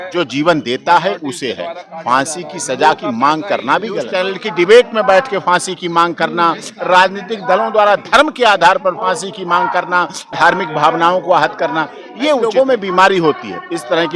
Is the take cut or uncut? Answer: cut